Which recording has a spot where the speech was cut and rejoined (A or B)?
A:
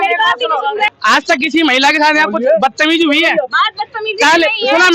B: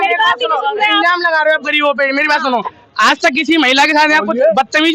A